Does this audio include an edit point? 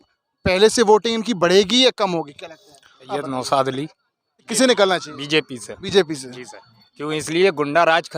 yes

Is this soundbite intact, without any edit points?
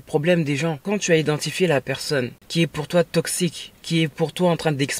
no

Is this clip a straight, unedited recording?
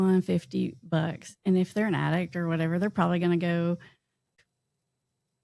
no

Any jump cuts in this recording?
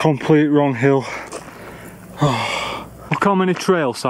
yes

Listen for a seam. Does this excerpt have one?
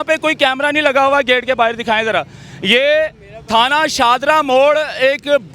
no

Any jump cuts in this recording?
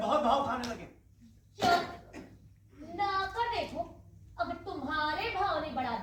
no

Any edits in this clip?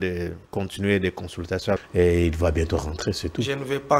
yes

